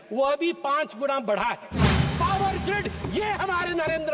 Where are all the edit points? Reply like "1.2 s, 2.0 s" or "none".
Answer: 2.1 s

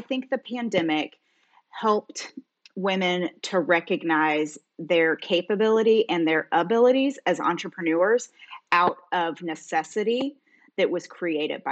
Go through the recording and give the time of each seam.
none

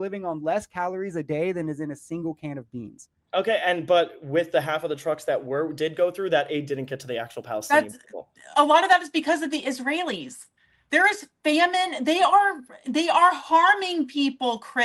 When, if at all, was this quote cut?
none

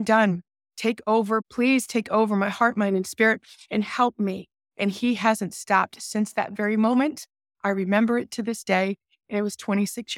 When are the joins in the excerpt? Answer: 1.5 s

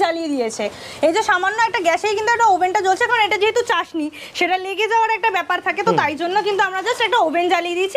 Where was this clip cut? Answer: none

